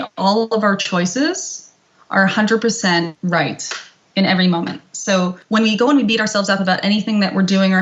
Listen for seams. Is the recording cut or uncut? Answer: cut